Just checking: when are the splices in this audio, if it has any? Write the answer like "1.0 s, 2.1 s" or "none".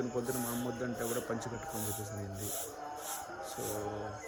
none